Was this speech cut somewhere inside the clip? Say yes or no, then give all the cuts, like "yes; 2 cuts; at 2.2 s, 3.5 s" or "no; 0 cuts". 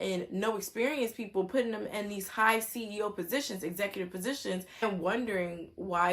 yes; 1 cut; at 4.8 s